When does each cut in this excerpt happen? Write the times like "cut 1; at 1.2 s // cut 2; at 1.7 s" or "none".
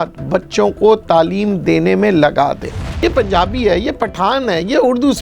cut 1; at 3.0 s